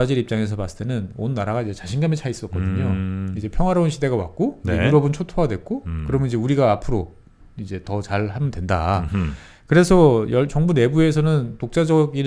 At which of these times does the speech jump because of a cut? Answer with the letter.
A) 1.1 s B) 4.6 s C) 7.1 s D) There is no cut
D